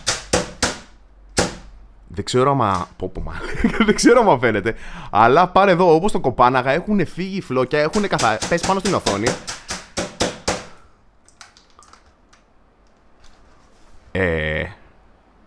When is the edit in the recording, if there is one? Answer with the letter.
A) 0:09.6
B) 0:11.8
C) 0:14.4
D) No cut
D